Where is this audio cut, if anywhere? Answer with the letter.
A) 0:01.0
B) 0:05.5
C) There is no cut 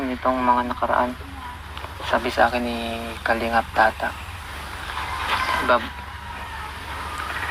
C